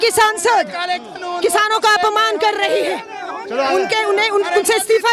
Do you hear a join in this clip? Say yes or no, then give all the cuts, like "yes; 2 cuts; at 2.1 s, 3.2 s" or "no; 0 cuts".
no; 0 cuts